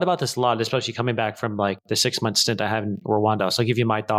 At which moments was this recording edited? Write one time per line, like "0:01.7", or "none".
none